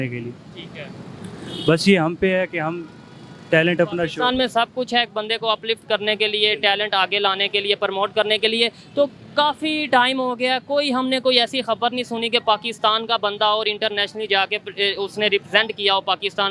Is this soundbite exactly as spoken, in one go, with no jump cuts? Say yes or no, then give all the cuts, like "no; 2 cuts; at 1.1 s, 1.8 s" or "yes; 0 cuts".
yes; 0 cuts